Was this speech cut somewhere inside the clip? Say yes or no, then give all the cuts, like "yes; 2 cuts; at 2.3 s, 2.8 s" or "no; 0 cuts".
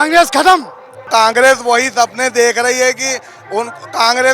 yes; 1 cut; at 1.1 s